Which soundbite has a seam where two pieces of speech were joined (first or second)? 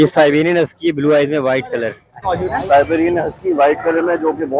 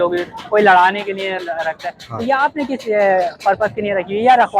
first